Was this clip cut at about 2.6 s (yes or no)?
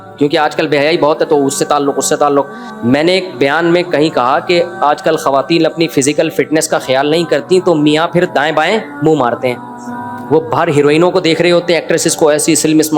yes